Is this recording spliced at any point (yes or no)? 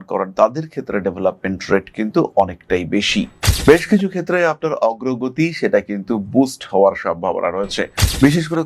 yes